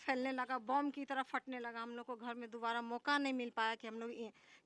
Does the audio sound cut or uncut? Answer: uncut